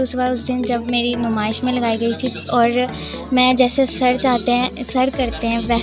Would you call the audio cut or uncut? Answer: uncut